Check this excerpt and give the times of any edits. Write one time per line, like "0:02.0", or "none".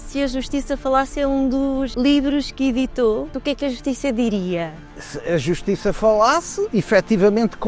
0:01.9
0:03.4
0:05.1
0:06.6